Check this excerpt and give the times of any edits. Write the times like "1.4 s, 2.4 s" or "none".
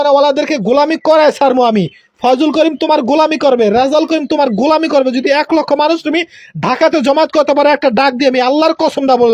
none